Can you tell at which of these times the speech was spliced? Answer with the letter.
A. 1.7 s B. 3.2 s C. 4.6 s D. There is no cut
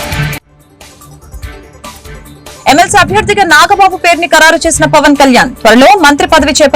D